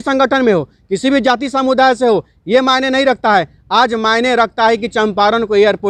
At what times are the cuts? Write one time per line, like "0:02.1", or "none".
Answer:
none